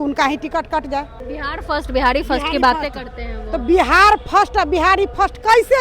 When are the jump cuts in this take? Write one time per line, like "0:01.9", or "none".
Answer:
0:01.3